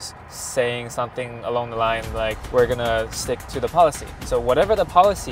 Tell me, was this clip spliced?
no; 0 cuts

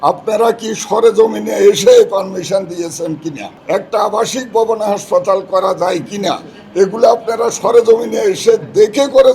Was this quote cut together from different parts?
yes; 1 cut; at 3.5 s

